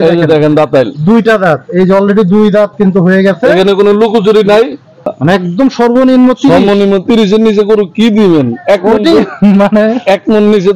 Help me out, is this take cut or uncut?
cut